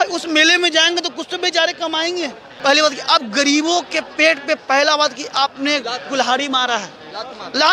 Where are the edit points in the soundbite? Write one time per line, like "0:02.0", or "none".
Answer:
0:02.4